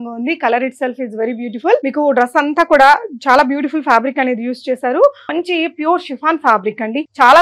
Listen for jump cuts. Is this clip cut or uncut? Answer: cut